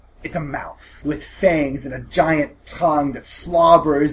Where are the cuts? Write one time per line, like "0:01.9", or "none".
0:00.9